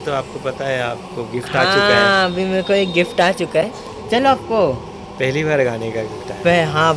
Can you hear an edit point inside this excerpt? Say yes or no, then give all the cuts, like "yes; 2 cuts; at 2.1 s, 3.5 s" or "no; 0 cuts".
no; 0 cuts